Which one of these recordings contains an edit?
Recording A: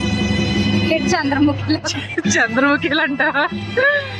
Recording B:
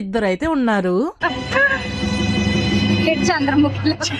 B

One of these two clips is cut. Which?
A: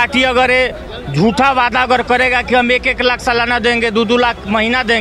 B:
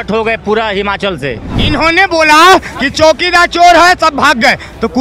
B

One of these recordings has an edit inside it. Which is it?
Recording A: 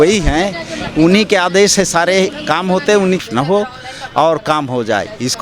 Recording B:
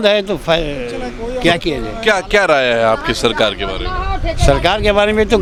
A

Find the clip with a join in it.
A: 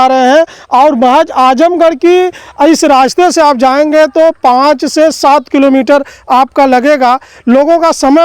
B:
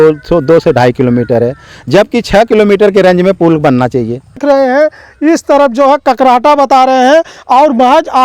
B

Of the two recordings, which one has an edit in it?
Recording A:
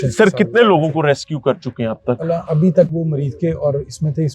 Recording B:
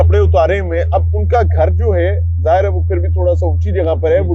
A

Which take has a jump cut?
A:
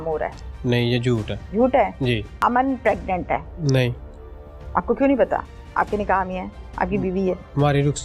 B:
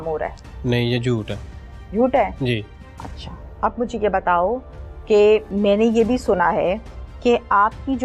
A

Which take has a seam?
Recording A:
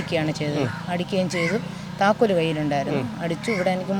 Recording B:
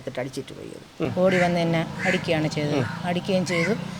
B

